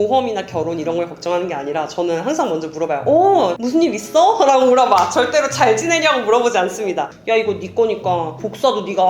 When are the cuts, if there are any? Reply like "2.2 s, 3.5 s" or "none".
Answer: 7.1 s